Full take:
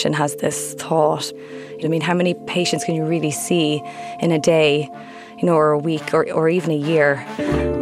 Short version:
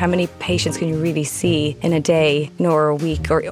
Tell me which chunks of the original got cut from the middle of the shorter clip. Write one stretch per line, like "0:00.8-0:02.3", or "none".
0:03.8-0:04.1
0:04.9-0:05.3